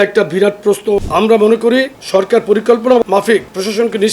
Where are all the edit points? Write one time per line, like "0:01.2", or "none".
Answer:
0:01.0
0:02.0
0:03.0